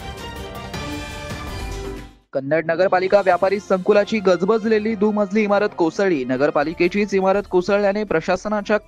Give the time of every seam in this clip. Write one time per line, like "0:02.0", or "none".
none